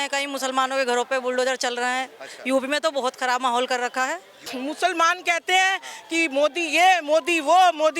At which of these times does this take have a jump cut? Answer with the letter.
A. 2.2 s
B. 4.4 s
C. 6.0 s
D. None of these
B